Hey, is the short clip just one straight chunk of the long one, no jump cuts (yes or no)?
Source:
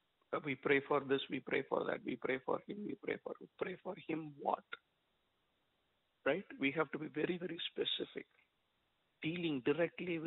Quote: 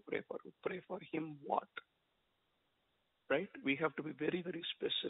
yes